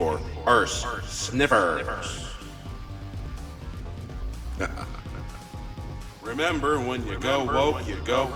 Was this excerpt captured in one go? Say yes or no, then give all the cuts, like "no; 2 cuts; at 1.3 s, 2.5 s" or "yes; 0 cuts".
yes; 0 cuts